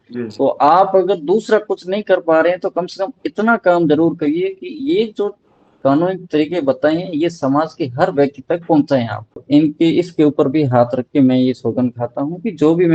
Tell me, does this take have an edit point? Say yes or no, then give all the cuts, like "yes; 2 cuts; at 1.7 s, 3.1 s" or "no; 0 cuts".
yes; 1 cut; at 9.4 s